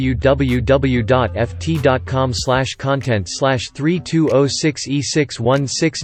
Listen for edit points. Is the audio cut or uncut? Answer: uncut